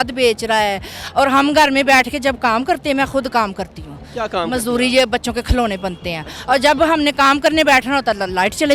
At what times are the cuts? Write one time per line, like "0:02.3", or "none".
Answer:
none